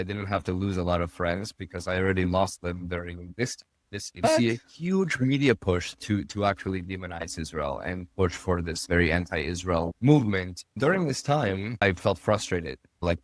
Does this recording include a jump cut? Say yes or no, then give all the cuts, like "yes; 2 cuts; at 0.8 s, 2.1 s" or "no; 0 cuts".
yes; 2 cuts; at 10.6 s, 11.7 s